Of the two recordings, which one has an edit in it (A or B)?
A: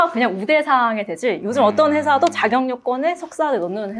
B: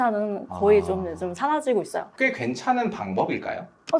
B